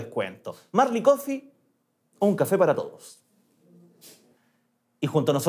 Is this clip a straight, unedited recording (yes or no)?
no